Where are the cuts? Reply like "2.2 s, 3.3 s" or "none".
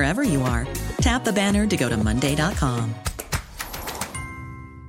none